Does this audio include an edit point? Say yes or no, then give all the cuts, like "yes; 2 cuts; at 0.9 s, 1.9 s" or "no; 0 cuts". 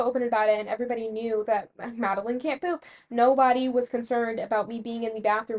no; 0 cuts